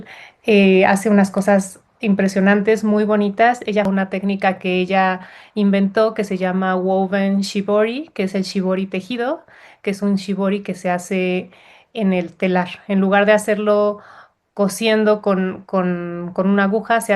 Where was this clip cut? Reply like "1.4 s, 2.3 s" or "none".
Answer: 3.9 s